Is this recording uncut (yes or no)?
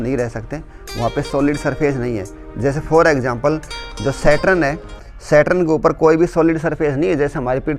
yes